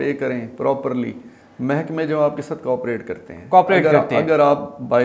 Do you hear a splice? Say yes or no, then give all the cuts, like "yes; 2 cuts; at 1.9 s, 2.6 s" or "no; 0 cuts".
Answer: no; 0 cuts